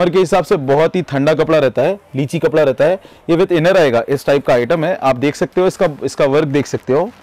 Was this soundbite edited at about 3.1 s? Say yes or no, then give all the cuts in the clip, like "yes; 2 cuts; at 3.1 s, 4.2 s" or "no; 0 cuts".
no; 0 cuts